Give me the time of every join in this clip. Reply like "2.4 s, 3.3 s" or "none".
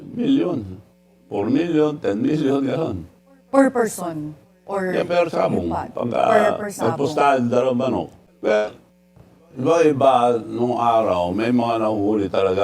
8.2 s